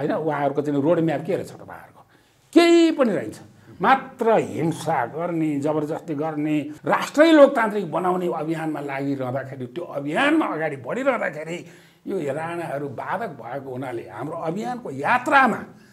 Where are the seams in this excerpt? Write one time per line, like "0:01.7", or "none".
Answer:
0:06.7